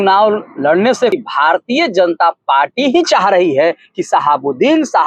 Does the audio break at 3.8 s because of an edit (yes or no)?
no